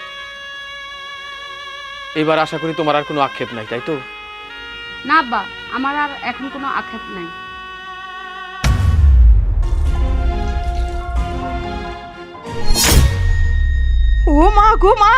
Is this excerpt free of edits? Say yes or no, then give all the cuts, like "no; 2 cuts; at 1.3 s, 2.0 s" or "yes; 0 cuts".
yes; 0 cuts